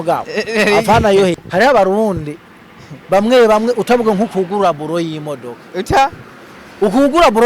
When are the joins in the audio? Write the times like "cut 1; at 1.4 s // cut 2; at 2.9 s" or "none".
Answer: cut 1; at 1.4 s